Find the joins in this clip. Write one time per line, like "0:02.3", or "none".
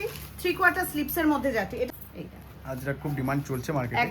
0:01.9